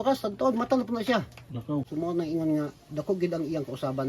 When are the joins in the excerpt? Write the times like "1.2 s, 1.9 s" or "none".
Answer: 1.9 s

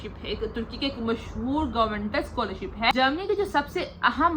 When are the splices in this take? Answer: 2.9 s

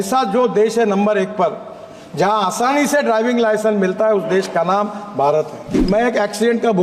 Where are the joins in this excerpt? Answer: 5.9 s

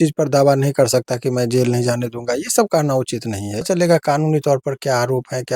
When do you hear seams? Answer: 3.7 s

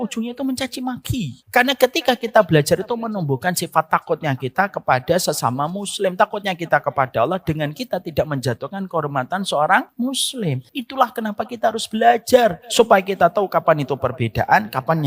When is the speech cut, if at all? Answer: 1.4 s, 10.3 s, 12.6 s

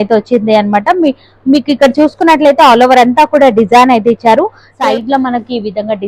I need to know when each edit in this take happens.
4.6 s

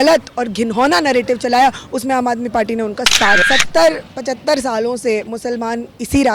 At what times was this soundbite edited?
3.4 s

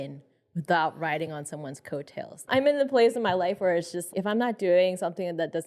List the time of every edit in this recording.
2.4 s, 4.1 s

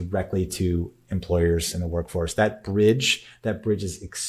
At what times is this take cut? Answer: none

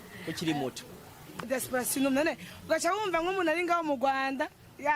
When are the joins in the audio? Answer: 1.5 s

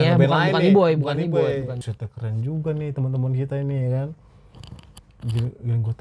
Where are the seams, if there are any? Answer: 1.8 s

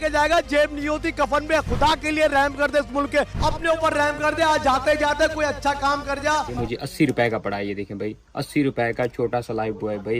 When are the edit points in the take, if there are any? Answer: none

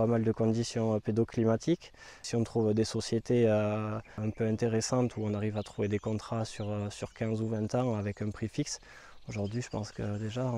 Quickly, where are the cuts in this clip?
2.3 s, 4.2 s

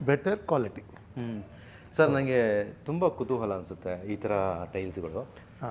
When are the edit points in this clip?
none

